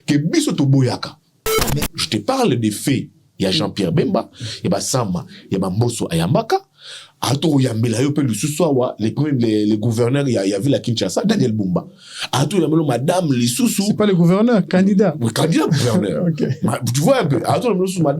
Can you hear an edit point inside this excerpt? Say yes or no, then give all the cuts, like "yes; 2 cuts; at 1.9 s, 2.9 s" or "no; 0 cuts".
yes; 1 cut; at 1.6 s